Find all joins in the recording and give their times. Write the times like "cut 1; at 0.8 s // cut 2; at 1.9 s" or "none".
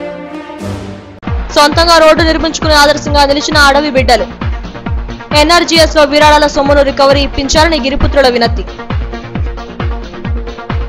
cut 1; at 1.0 s